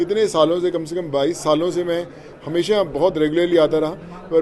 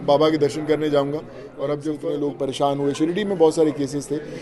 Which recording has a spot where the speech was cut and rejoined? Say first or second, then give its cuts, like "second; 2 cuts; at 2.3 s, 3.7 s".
second; 1 cut; at 1.9 s